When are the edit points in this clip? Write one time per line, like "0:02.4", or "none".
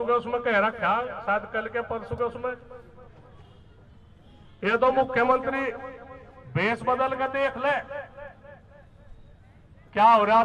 none